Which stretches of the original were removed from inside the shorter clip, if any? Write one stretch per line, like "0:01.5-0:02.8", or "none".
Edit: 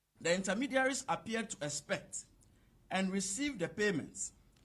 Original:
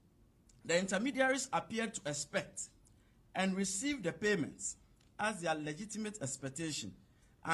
none